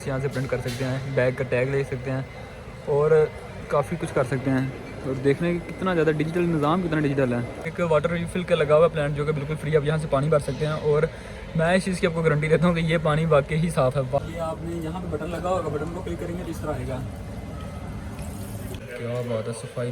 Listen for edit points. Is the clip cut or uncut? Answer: cut